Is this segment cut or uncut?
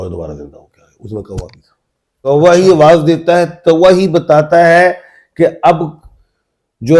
cut